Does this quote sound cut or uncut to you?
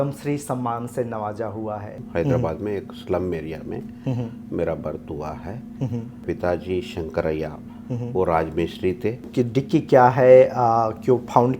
cut